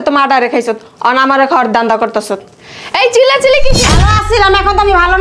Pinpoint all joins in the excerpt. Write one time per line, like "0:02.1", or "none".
0:03.9